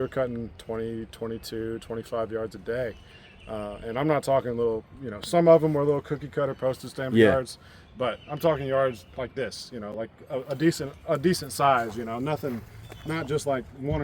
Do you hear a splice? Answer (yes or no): no